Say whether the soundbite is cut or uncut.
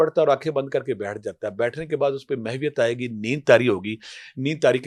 uncut